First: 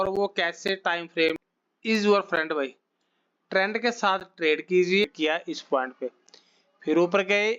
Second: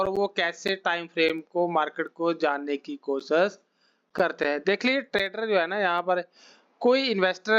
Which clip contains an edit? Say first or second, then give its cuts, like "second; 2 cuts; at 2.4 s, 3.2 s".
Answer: first; 2 cuts; at 1.4 s, 5.1 s